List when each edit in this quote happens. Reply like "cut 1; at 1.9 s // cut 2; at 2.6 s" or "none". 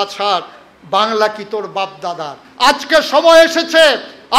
cut 1; at 2.4 s